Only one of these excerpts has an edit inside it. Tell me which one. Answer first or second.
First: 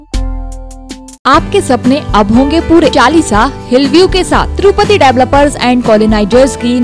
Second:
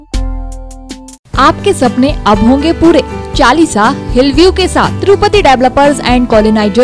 first